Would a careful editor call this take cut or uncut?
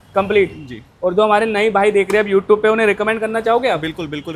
uncut